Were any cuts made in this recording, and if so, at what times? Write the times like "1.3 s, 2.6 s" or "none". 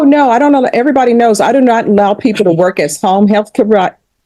none